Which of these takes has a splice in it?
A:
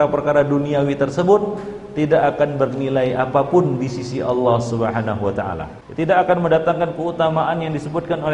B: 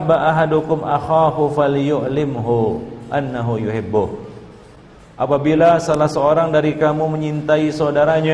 A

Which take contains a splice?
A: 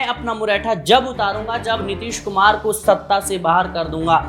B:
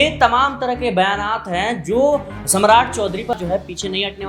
B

